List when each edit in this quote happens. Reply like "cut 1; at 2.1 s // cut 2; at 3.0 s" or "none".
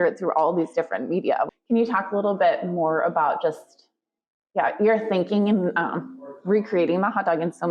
cut 1; at 1.5 s